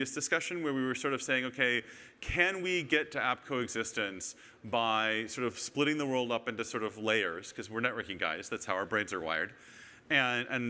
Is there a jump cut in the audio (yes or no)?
no